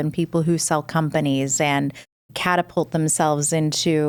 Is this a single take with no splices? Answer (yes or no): yes